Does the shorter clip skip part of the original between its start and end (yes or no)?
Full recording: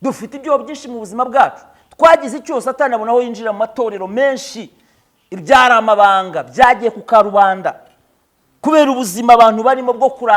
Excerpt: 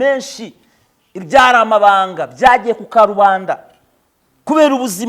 no